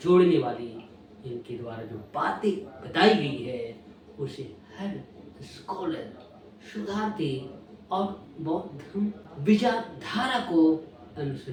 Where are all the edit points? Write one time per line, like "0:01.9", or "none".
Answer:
none